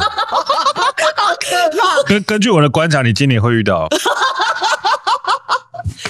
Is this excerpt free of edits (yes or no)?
yes